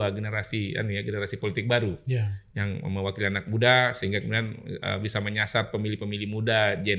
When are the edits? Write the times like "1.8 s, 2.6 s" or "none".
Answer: none

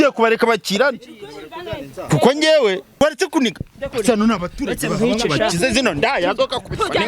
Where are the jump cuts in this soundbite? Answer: 3.0 s

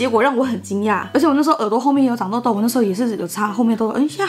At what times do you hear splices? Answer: 1.1 s

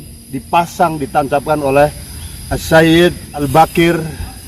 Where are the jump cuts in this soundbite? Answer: 3.4 s

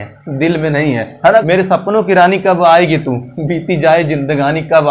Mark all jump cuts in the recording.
1.4 s

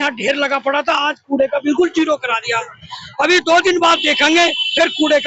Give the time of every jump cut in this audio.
none

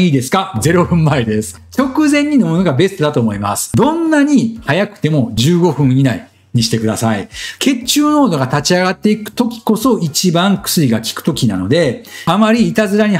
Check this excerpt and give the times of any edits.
none

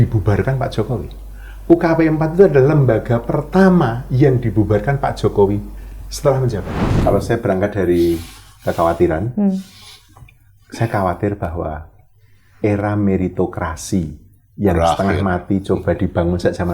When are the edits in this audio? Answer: 7.0 s

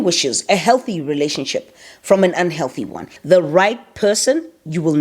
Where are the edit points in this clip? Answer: 3.1 s

